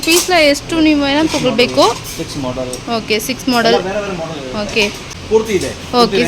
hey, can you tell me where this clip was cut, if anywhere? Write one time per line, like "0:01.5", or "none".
0:05.1